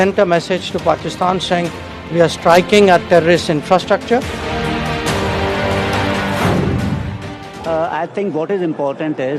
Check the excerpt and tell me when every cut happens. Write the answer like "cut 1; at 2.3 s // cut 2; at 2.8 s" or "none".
cut 1; at 7.5 s

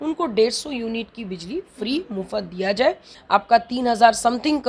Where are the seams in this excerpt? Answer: cut 1; at 3.1 s

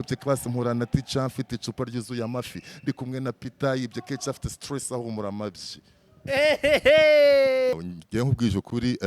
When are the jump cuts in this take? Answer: cut 1; at 7.7 s

